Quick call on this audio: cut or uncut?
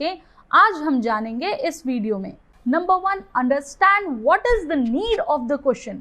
cut